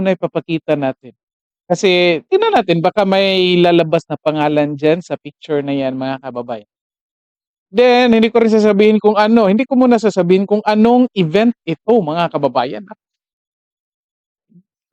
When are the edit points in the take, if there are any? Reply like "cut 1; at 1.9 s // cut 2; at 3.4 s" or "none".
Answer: none